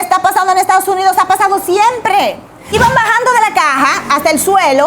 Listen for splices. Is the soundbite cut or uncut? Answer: cut